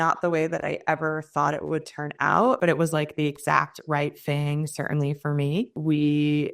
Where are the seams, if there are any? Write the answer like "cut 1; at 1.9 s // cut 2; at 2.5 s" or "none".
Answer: cut 1; at 2.6 s // cut 2; at 5.7 s